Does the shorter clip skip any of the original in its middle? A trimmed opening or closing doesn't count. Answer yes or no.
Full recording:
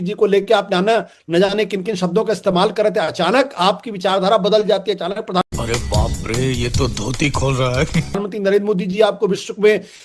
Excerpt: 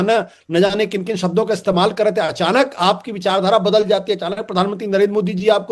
yes